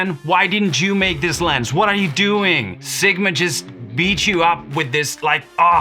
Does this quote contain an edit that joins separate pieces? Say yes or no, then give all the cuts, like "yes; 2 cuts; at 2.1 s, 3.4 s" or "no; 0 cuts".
yes; 1 cut; at 2.8 s